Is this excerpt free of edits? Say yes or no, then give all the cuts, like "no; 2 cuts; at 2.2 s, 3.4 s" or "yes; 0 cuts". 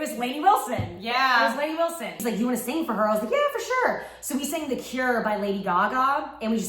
no; 1 cut; at 2.1 s